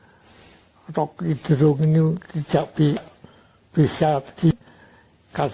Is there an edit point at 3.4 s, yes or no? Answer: no